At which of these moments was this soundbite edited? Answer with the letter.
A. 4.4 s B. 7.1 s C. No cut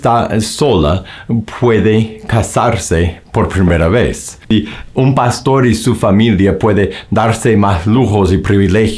A